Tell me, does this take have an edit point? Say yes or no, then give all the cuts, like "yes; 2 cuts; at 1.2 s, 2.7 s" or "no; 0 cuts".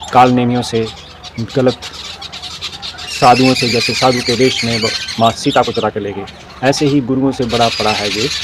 no; 0 cuts